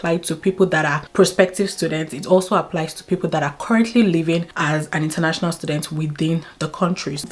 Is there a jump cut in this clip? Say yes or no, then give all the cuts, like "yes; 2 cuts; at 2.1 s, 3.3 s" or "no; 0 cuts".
no; 0 cuts